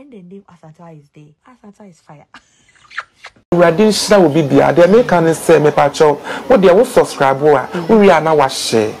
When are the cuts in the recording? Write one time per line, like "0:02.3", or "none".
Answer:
0:01.4
0:03.4